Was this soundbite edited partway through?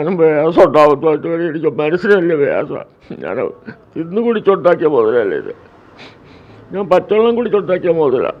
no; 0 cuts

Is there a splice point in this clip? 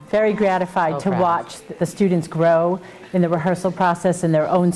yes; 1 cut; at 1.6 s

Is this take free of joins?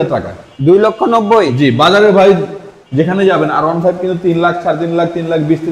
yes; 0 cuts

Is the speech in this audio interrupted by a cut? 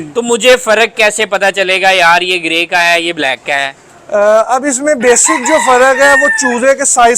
no; 0 cuts

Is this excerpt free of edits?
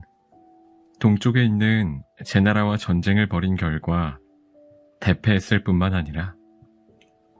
yes; 0 cuts

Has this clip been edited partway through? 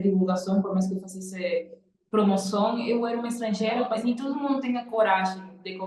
yes; 1 cut; at 4.0 s

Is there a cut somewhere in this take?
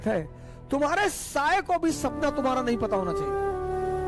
yes; 1 cut; at 3.1 s

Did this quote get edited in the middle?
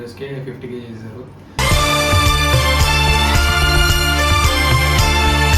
no; 0 cuts

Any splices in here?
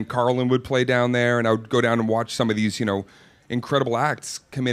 yes; 1 cut; at 1.7 s

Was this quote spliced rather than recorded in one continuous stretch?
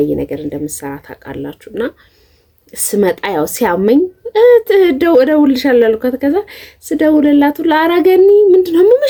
no; 0 cuts

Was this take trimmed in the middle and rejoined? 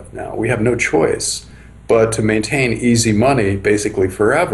no; 0 cuts

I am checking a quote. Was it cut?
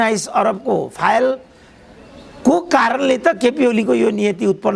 no; 0 cuts

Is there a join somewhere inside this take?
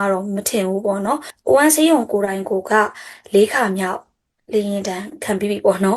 yes; 1 cut; at 1.3 s

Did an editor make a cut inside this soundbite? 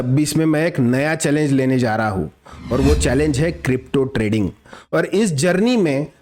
no; 0 cuts

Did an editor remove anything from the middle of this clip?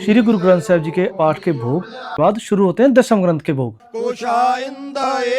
yes; 2 cuts; at 1.9 s, 4.0 s

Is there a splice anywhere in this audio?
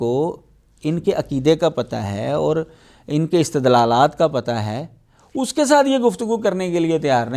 no; 0 cuts

